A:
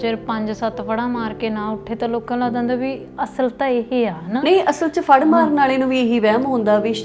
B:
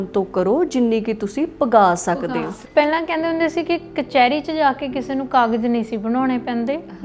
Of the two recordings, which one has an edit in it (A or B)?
B